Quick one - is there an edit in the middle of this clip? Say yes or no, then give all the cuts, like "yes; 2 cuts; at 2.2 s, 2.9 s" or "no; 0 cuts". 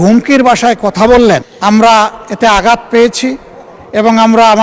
yes; 1 cut; at 1.5 s